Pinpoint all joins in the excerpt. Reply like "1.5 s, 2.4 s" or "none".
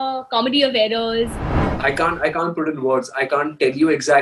1.6 s